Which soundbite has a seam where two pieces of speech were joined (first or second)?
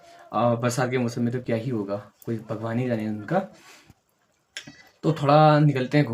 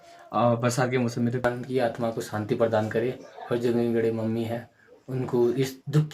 second